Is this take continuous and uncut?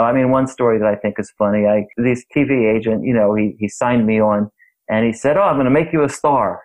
no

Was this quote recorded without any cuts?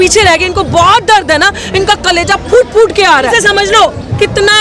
no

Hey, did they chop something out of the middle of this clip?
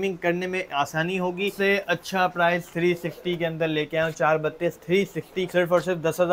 yes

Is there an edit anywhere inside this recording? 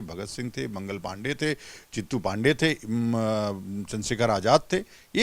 no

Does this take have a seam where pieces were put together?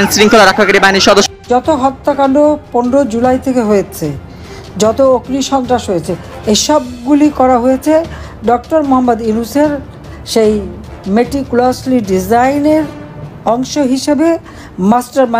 yes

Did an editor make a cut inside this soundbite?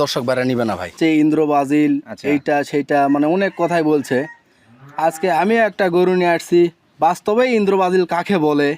yes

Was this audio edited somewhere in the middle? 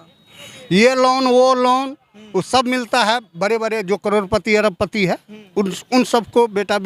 no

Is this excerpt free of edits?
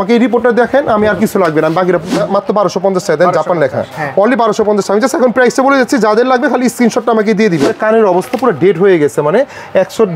no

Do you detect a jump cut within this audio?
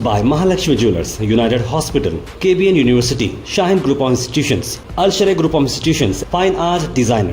no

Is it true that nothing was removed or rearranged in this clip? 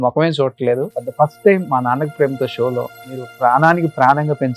no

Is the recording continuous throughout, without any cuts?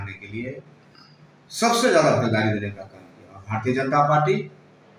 yes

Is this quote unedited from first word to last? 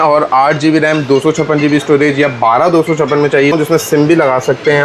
no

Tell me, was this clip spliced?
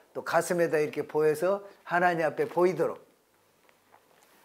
no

